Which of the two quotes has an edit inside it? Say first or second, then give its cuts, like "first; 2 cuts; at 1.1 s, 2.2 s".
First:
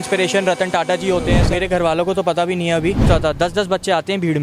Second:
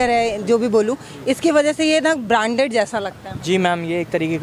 first; 2 cuts; at 1.4 s, 3.0 s